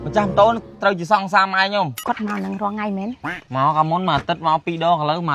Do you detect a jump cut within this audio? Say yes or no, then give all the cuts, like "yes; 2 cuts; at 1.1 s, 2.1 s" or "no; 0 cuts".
yes; 1 cut; at 2.0 s